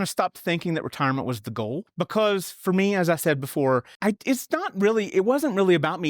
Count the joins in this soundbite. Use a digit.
2